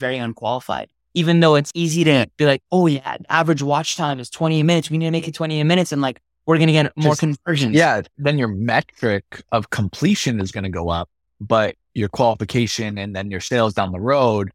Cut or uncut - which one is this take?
cut